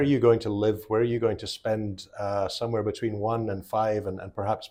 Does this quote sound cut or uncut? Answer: uncut